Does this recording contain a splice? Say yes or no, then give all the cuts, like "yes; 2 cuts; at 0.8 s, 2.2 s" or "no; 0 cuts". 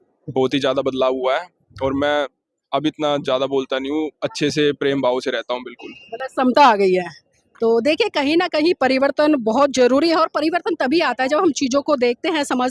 no; 0 cuts